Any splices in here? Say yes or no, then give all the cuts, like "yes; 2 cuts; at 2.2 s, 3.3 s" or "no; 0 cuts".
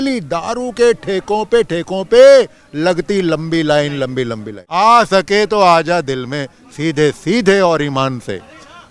yes; 1 cut; at 4.6 s